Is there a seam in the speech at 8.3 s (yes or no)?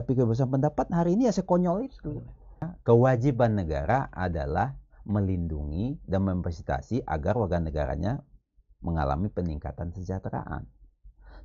no